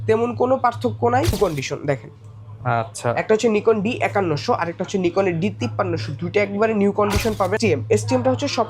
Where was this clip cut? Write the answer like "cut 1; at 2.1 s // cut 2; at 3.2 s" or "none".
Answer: cut 1; at 1.4 s // cut 2; at 7.6 s